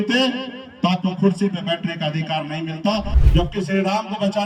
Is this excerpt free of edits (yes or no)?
no